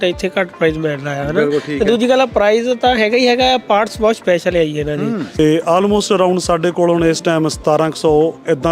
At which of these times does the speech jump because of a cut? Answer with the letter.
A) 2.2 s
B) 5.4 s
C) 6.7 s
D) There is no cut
B